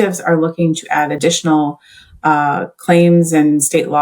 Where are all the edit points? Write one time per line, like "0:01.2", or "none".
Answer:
none